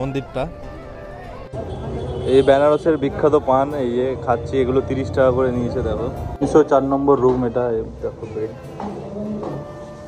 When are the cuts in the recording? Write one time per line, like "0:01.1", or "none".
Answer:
0:01.4
0:06.3